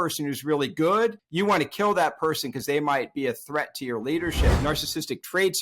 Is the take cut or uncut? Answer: cut